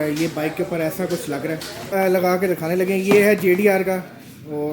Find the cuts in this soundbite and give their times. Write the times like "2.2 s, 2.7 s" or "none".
1.7 s